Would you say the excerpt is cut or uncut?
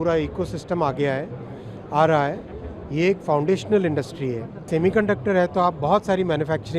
cut